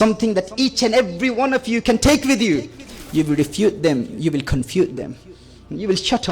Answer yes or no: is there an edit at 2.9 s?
yes